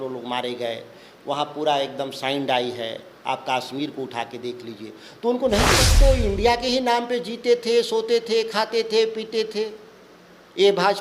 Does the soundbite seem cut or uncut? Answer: cut